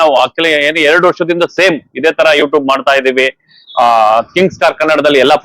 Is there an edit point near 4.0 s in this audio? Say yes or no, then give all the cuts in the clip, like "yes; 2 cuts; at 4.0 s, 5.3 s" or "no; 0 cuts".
no; 0 cuts